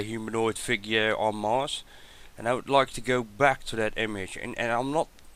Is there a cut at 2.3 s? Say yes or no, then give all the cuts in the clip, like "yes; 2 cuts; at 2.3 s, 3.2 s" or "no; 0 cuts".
no; 1 cut; at 4.3 s